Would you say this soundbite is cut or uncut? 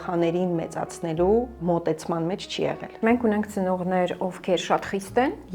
cut